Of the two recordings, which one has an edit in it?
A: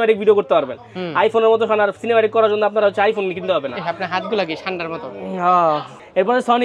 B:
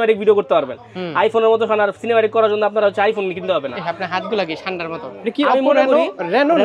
B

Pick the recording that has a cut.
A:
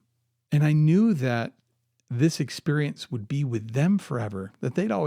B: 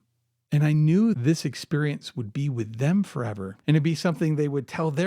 B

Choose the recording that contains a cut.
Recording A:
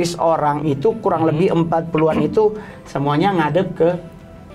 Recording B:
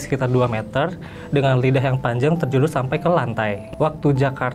B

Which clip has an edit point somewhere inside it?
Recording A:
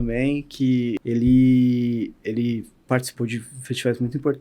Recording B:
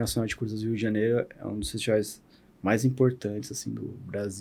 A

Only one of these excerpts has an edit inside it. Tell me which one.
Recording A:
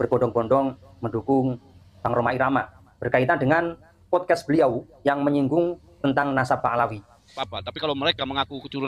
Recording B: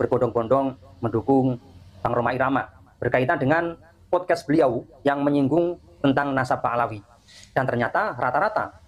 A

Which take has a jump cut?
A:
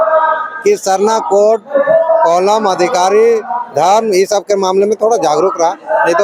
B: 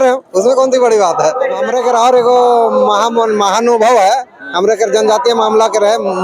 B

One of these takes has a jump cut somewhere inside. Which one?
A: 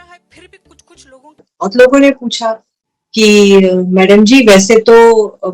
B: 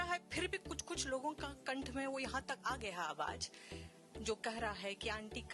A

